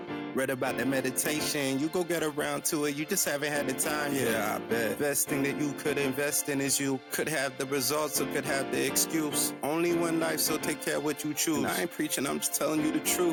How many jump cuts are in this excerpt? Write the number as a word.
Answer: zero